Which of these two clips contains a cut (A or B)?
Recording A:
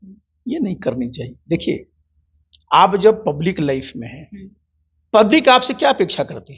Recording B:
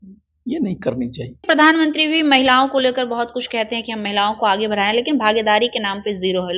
B